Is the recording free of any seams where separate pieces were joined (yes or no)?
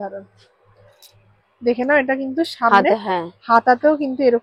yes